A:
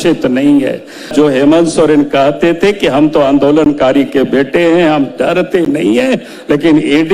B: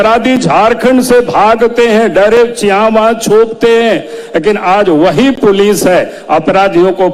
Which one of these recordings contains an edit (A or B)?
A